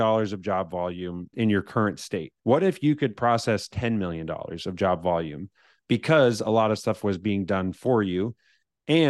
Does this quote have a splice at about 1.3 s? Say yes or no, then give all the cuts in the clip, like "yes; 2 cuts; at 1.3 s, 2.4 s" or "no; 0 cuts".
yes; 2 cuts; at 1.3 s, 2.3 s